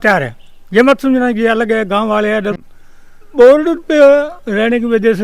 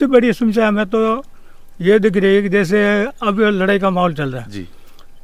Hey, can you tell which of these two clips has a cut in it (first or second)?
first